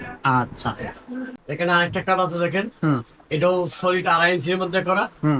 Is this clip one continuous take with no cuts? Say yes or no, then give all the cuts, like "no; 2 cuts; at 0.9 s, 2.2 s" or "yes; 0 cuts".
no; 1 cut; at 1.4 s